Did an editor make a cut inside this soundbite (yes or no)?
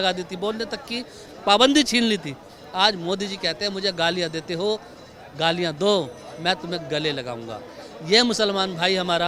no